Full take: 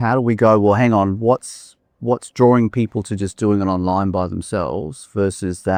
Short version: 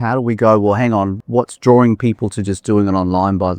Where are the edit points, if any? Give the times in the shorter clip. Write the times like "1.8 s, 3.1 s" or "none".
1.1 s